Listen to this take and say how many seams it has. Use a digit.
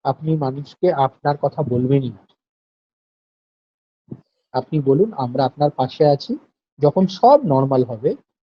0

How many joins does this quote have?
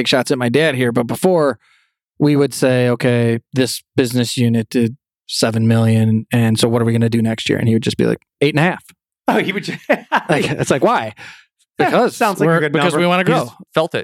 0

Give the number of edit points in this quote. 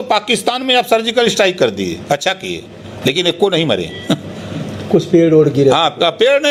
0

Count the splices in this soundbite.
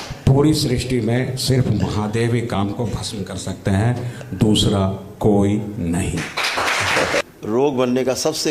1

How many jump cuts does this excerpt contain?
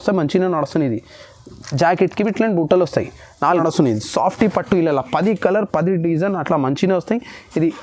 1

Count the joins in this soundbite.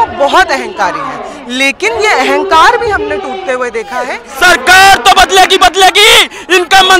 1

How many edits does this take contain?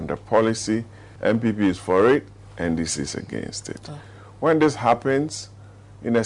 1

